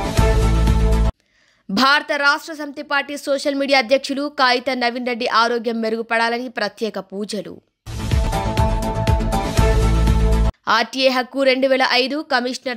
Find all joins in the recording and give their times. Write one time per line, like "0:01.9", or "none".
0:01.2